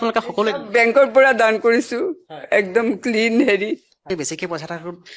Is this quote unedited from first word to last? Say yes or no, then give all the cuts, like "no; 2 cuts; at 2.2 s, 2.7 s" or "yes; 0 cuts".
no; 1 cut; at 4.0 s